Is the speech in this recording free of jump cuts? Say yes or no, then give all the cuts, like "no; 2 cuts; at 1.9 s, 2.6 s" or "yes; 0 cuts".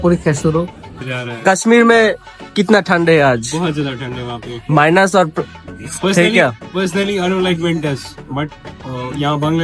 no; 1 cut; at 1.3 s